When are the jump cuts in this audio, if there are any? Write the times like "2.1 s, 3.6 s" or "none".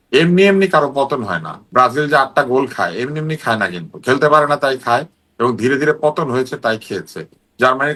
none